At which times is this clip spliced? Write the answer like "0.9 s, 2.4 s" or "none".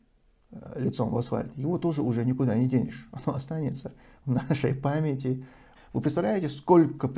5.6 s